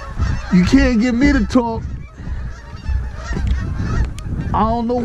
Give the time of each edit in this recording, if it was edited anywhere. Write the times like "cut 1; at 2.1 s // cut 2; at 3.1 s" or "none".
none